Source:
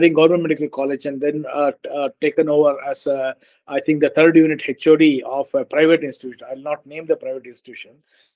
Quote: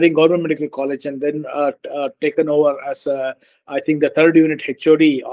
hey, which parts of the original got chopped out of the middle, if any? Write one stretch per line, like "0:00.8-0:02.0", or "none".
none